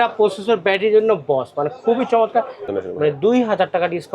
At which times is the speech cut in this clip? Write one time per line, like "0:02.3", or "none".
0:02.6